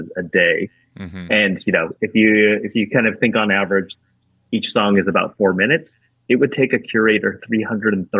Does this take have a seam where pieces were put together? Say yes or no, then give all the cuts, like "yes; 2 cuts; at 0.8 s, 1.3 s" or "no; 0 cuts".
no; 0 cuts